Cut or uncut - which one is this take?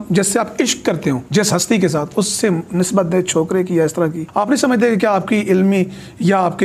cut